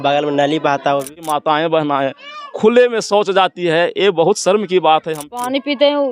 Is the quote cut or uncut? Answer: cut